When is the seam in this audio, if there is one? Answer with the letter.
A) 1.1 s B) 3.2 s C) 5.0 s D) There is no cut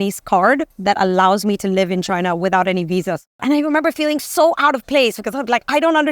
B